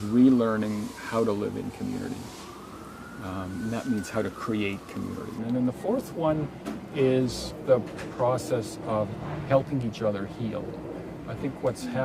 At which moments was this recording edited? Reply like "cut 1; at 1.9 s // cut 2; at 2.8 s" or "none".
cut 1; at 5.4 s // cut 2; at 7.5 s